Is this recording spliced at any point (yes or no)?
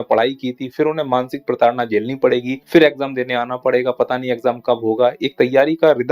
yes